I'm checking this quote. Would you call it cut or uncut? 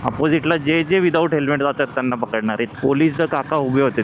uncut